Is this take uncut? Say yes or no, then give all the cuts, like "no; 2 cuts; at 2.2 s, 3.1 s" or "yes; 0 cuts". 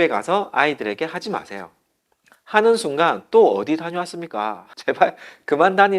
no; 1 cut; at 4.7 s